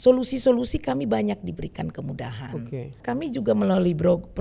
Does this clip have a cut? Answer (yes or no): yes